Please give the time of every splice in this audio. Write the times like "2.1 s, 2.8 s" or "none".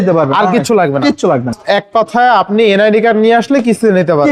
1.6 s